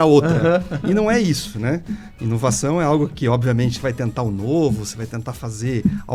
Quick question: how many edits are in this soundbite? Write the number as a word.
zero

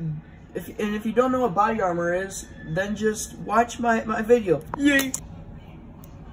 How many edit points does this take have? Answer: one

